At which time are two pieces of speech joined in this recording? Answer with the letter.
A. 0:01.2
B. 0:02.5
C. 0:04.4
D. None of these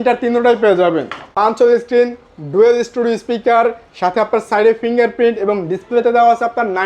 A